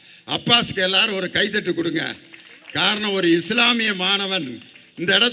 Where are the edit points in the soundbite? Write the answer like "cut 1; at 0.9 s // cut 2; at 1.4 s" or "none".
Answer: none

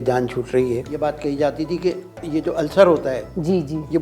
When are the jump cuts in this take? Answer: cut 1; at 0.9 s // cut 2; at 2.1 s

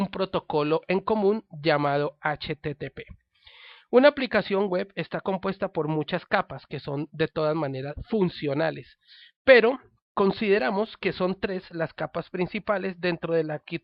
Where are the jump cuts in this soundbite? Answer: cut 1; at 6.0 s

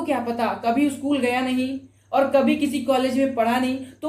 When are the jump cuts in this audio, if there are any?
none

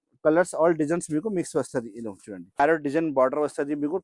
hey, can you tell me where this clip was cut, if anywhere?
cut 1; at 2.6 s

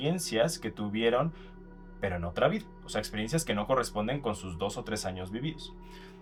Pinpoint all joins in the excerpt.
none

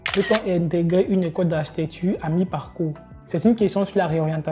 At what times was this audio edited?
none

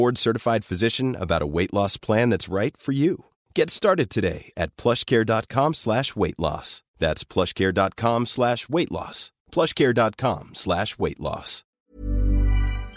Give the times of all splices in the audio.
cut 1; at 11.7 s

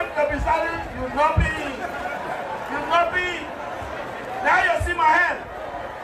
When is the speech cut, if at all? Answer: none

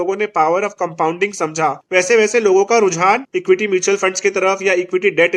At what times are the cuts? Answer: cut 1; at 1.8 s // cut 2; at 3.3 s

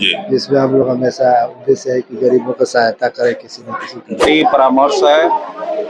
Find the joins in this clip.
cut 1; at 4.2 s

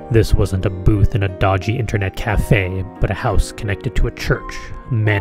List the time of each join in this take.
none

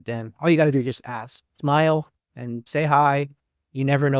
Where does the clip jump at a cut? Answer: none

